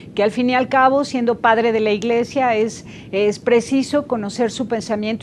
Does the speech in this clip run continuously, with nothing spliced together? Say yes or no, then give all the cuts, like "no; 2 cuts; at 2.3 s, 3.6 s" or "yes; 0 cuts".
no; 1 cut; at 3.6 s